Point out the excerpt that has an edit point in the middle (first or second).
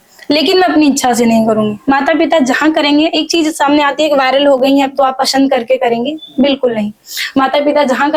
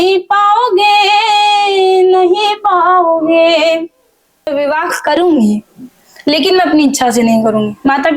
second